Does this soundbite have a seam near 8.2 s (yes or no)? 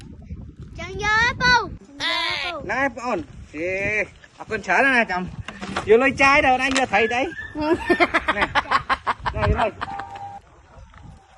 no